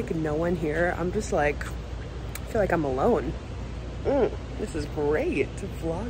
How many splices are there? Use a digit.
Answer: 0